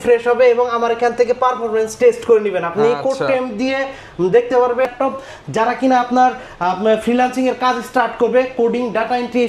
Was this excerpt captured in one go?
no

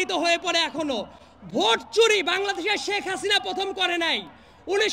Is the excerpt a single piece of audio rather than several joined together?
yes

